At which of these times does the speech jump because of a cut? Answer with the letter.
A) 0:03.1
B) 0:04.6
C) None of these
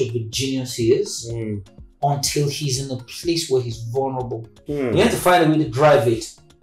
B